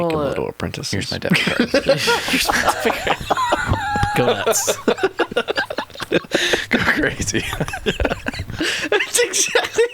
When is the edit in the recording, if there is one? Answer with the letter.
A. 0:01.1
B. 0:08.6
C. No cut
B